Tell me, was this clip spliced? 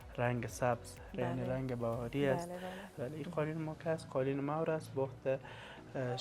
yes; 1 cut; at 3.0 s

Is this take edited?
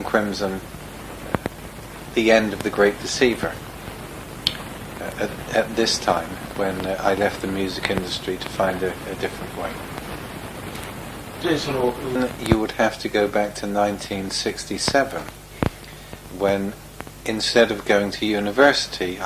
yes; 1 cut; at 1.3 s

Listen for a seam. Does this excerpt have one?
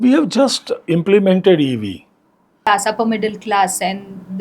yes; 1 cut; at 2.7 s

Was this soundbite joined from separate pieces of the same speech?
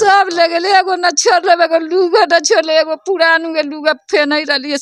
no; 0 cuts

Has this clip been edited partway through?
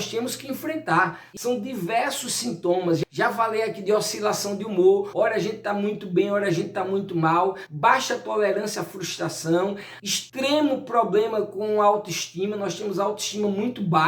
yes; 1 cut; at 1.3 s

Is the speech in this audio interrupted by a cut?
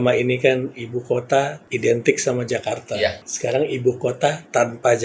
yes; 2 cuts; at 1.6 s, 3.3 s

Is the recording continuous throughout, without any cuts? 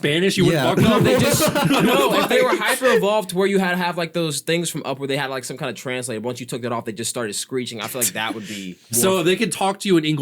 no; 1 cut; at 8.8 s

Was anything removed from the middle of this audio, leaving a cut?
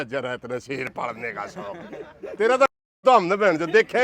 no; 0 cuts

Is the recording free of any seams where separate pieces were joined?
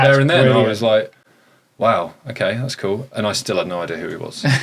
yes; 0 cuts

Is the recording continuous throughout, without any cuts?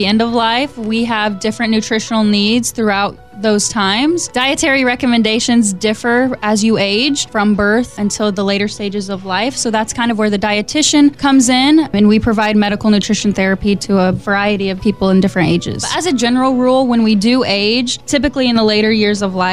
no; 1 cut; at 15.9 s

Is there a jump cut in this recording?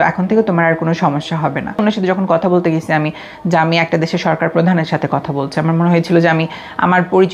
yes; 1 cut; at 1.8 s

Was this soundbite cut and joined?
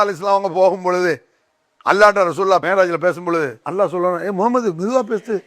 yes; 2 cuts; at 2.6 s, 3.6 s

